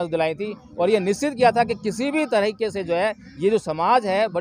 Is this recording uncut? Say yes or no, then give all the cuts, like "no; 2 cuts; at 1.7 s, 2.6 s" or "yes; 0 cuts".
yes; 0 cuts